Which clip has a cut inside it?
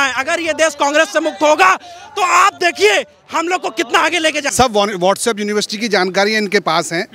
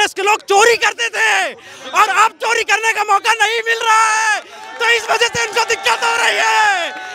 first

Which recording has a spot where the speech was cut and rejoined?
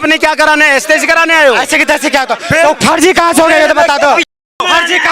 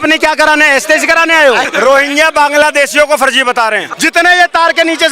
second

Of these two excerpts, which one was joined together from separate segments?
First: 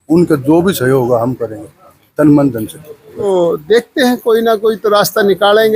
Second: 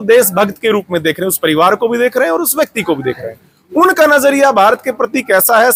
first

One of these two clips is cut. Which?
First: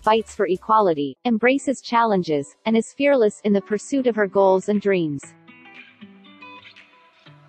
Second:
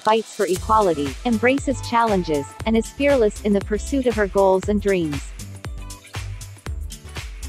second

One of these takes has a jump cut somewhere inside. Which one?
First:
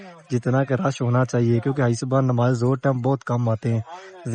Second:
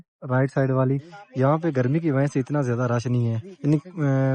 second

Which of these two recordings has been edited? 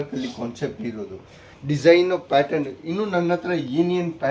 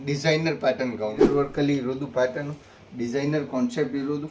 second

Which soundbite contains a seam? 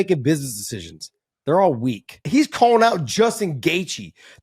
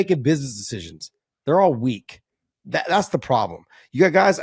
first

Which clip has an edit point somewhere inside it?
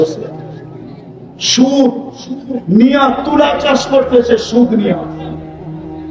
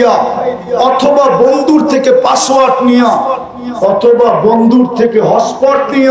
first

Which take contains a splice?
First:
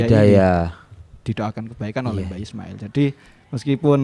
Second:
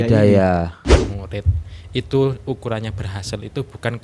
second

